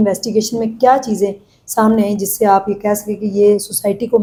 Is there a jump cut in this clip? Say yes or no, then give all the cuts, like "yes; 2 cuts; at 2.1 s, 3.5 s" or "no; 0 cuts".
no; 0 cuts